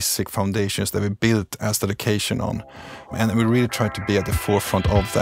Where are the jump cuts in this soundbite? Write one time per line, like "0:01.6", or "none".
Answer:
0:03.1